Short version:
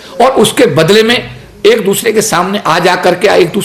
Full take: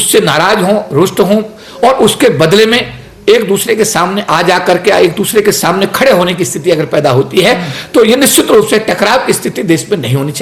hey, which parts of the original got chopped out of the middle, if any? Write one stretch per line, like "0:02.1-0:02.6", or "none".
none